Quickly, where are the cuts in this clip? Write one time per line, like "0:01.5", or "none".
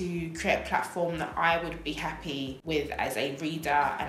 none